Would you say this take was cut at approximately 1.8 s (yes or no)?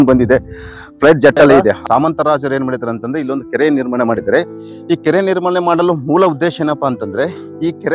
yes